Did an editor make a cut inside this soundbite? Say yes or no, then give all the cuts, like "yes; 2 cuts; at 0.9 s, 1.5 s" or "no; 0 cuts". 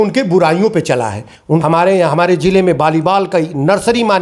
yes; 1 cut; at 1.6 s